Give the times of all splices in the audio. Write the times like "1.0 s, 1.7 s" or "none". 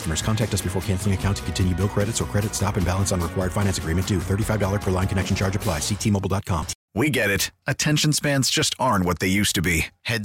6.8 s